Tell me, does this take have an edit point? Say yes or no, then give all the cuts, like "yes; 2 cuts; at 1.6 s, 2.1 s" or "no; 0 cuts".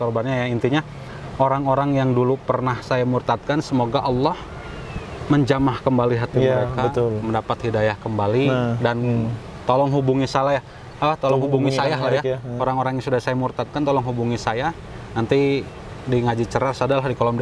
no; 0 cuts